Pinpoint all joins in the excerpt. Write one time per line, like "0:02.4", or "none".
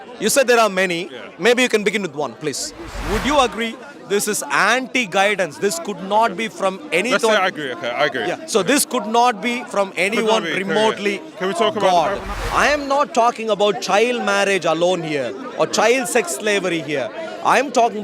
0:03.0
0:12.3